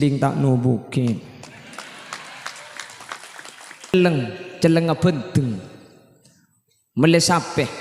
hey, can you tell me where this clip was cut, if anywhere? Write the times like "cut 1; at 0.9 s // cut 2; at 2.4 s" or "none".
cut 1; at 3.9 s